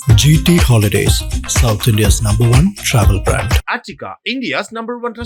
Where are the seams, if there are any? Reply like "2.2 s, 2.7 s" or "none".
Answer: none